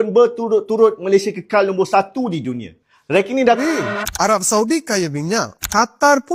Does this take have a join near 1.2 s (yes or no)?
no